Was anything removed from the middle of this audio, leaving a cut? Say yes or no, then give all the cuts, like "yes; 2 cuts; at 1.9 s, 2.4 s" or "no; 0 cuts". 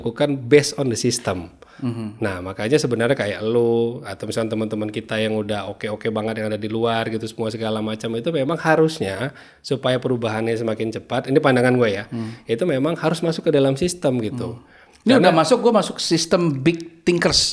no; 0 cuts